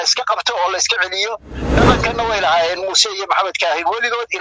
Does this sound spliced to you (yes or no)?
yes